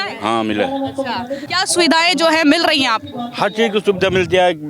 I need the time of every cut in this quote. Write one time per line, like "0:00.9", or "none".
0:01.4